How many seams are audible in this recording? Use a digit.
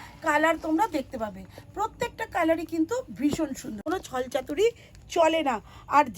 1